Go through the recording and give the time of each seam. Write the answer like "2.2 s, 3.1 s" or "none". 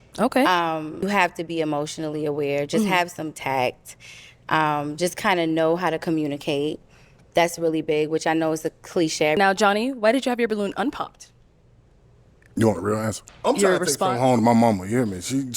1.0 s, 9.4 s, 13.3 s